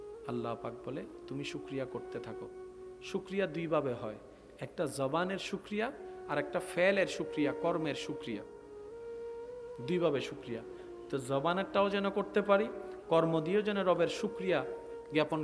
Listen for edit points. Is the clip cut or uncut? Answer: cut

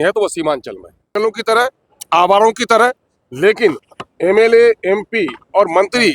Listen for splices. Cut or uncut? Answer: cut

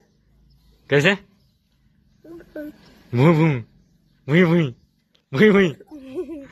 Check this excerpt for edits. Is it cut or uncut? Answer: uncut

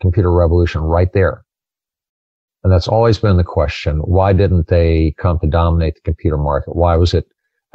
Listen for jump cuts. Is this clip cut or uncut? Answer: uncut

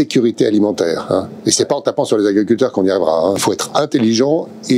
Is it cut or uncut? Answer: cut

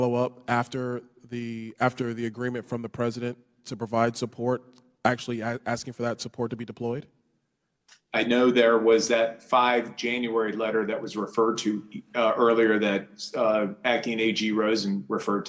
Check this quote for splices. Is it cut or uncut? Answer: uncut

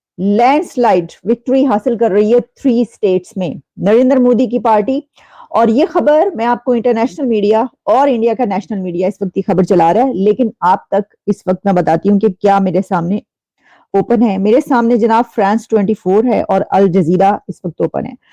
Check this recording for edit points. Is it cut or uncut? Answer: uncut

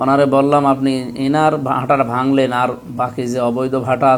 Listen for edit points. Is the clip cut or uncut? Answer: uncut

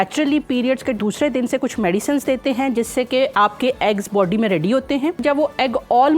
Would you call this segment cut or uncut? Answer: cut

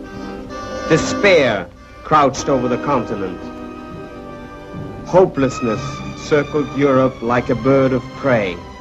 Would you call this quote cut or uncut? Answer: uncut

